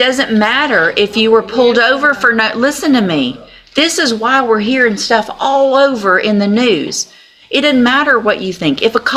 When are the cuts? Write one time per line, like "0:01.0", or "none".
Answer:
none